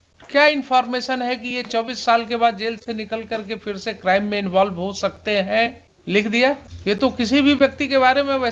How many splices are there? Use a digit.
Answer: 2